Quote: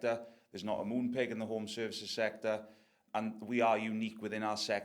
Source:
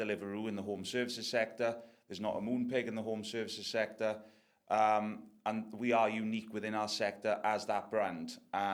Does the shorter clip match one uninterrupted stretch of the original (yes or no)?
no